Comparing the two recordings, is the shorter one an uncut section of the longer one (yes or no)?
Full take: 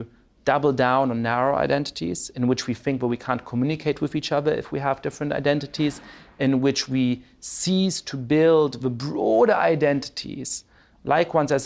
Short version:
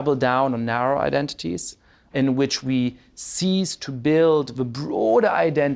no